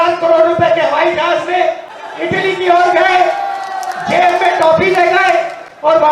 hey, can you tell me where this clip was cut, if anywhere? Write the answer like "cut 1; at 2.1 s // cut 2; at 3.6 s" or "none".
cut 1; at 1.9 s

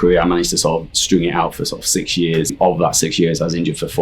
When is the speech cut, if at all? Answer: cut 1; at 2.5 s

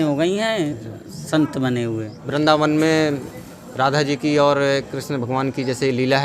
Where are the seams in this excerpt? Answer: cut 1; at 2.2 s

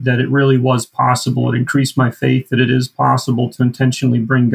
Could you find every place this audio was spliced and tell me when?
none

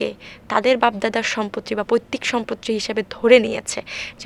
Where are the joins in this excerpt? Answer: none

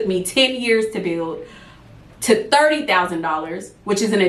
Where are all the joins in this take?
none

